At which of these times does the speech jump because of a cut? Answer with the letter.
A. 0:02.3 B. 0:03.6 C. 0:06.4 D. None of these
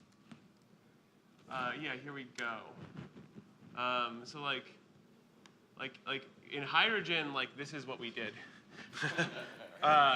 B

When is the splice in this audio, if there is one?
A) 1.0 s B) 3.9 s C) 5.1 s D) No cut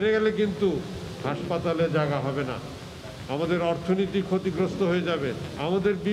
D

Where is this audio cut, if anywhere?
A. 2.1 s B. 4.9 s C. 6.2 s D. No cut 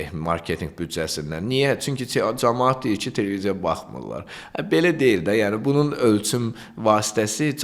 D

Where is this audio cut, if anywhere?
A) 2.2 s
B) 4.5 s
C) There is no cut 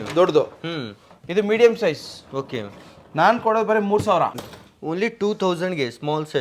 B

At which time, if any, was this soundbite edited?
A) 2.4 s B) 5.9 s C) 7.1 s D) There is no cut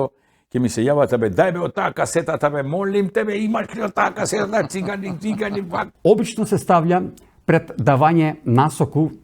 B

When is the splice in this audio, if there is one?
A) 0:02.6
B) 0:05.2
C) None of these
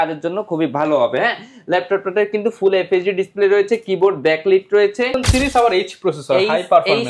B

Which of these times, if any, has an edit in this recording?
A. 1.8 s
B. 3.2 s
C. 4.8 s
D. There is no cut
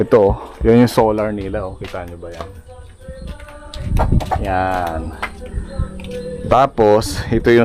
D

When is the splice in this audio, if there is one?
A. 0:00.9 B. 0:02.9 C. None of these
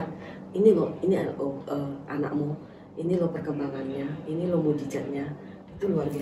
C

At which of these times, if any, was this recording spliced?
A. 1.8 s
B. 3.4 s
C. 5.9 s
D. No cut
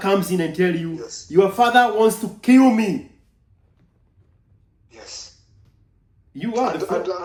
D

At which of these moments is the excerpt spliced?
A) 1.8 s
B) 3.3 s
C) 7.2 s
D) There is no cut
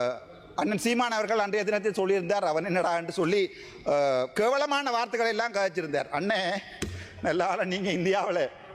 D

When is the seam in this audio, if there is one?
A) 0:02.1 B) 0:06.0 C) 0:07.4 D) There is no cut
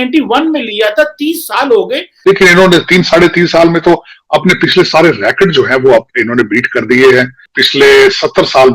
A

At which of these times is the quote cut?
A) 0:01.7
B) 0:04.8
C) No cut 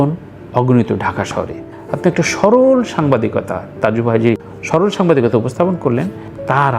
A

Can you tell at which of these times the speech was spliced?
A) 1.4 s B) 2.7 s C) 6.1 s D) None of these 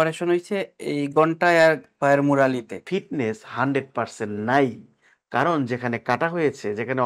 B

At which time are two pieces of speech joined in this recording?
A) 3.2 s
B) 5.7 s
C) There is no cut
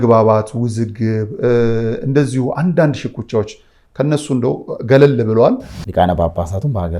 B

